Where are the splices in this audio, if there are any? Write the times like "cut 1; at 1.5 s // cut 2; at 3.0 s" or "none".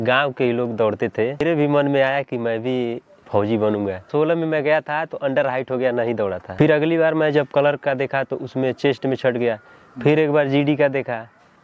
cut 1; at 1.4 s // cut 2; at 4.1 s // cut 3; at 6.4 s